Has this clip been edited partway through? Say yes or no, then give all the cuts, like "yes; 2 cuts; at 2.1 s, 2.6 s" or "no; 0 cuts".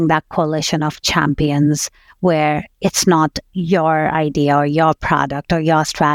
no; 0 cuts